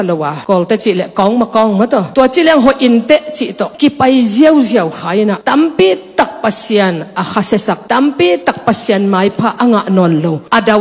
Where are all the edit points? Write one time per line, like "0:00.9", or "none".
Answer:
none